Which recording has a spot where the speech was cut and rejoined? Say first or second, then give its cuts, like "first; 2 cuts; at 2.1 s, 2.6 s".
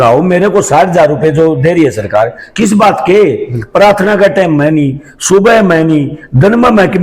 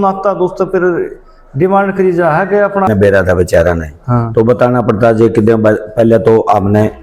second; 1 cut; at 2.9 s